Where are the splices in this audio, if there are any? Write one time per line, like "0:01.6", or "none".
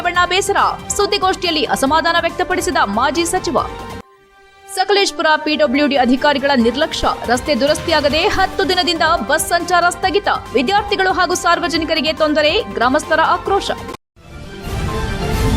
0:13.9